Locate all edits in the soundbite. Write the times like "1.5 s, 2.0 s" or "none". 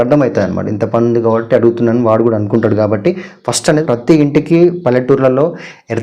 3.8 s